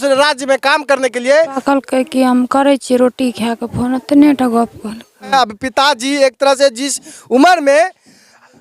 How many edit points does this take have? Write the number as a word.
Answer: two